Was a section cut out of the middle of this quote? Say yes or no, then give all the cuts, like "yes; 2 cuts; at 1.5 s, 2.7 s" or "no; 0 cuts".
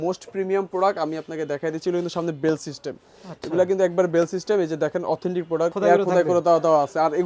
no; 0 cuts